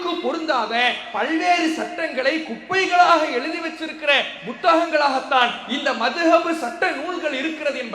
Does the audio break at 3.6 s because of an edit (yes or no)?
no